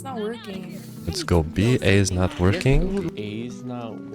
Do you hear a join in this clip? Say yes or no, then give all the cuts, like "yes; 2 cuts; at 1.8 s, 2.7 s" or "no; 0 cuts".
yes; 1 cut; at 3.1 s